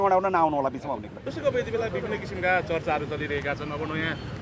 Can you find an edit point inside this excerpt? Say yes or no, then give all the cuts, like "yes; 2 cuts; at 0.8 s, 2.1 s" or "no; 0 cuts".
no; 0 cuts